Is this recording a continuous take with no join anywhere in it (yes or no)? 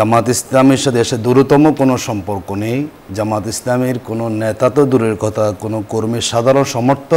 yes